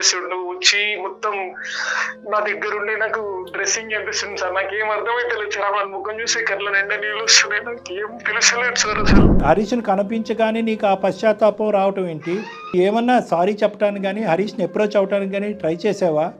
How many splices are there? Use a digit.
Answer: 2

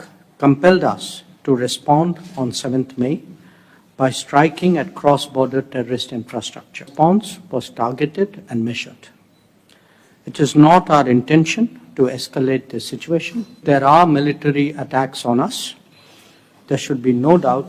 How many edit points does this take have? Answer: 2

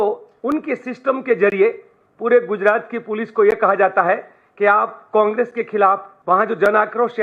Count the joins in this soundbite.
1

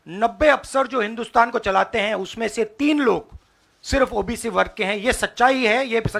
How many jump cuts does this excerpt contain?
0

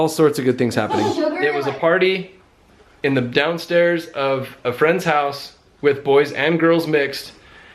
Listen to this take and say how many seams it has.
1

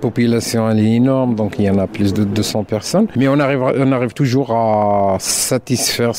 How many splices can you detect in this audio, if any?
0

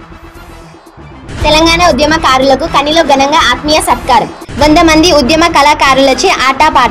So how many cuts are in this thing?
1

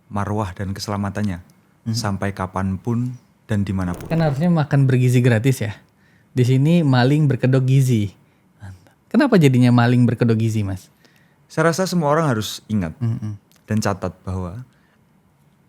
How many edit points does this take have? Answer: 1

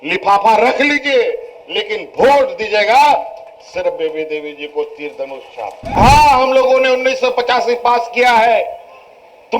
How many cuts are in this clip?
1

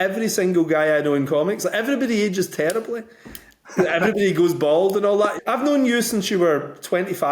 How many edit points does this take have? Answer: 1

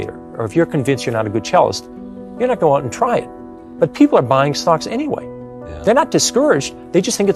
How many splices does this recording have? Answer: 0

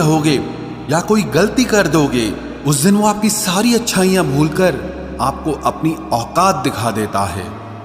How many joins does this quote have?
0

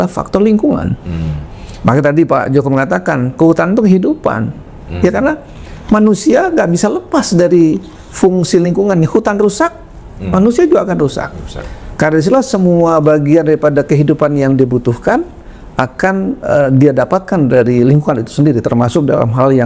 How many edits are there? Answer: 0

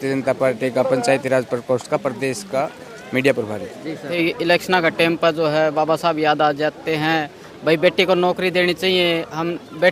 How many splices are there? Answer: 1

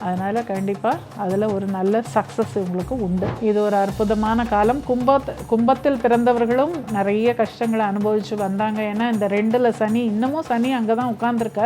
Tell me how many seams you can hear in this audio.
1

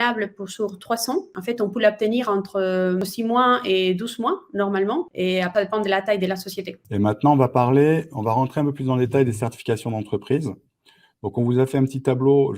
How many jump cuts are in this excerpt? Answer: 4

